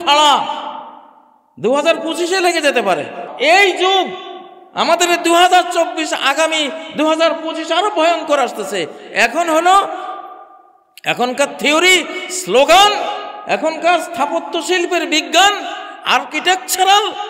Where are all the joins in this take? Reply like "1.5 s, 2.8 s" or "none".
3.2 s